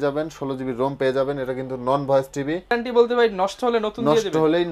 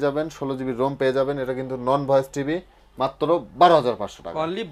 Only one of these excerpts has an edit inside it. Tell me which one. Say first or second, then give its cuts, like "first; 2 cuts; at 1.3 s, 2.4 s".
first; 1 cut; at 2.7 s